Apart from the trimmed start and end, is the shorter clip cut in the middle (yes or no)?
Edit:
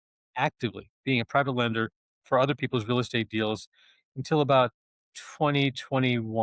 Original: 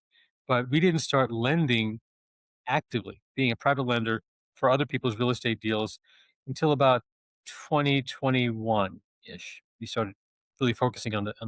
no